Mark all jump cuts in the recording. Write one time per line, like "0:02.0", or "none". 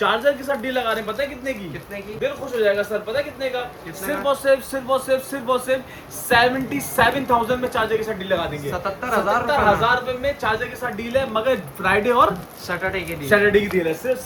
none